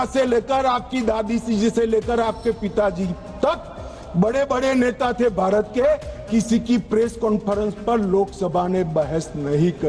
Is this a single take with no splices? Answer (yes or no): yes